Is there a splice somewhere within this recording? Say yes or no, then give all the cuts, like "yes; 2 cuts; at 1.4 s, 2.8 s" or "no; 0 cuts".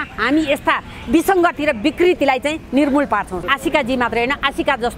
yes; 1 cut; at 3.5 s